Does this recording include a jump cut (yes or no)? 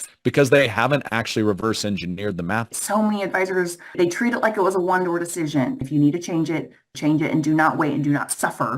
yes